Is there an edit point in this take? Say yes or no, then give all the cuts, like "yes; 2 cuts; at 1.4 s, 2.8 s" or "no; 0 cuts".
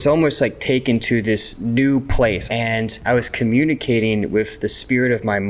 yes; 2 cuts; at 1.5 s, 2.5 s